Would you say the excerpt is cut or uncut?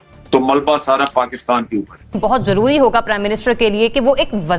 cut